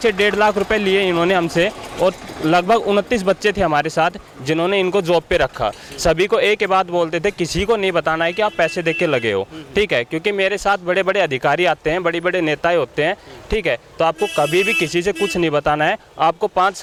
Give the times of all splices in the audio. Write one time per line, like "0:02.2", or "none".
none